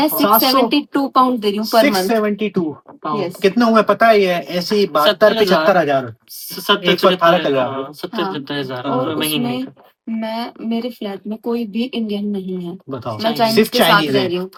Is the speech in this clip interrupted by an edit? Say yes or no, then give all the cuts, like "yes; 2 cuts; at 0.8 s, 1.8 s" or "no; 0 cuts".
no; 0 cuts